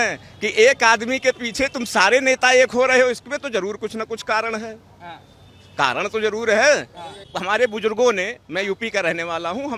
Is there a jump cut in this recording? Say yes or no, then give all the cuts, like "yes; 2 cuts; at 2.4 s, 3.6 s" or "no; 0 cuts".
yes; 1 cut; at 7.3 s